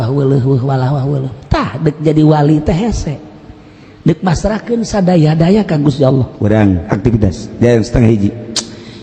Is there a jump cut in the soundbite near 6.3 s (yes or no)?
yes